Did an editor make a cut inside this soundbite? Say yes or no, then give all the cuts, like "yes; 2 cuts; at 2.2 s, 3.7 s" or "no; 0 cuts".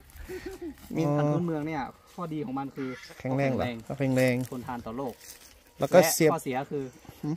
yes; 1 cut; at 1.1 s